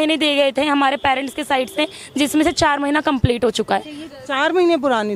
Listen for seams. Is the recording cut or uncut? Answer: uncut